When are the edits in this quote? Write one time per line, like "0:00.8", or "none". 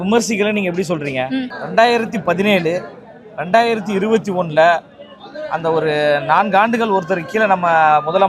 0:01.6